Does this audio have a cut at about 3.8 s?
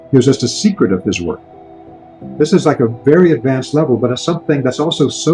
no; 1 cut; at 1.7 s

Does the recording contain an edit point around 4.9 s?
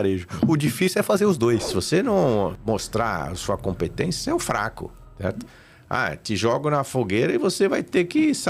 no; 2 cuts; at 1.7 s, 2.6 s

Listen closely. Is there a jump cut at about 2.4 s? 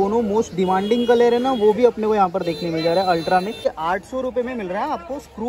no; 1 cut; at 3.6 s

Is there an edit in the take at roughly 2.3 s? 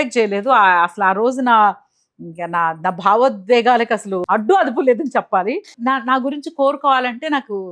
no; 1 cut; at 5.7 s

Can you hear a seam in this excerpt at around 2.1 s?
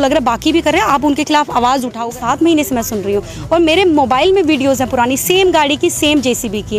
yes; 1 cut; at 2.1 s

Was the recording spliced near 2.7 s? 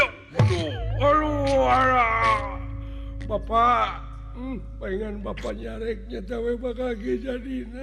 no; 0 cuts

